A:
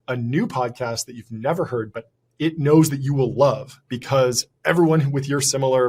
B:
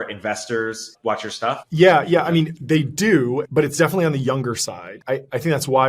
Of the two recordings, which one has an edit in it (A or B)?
B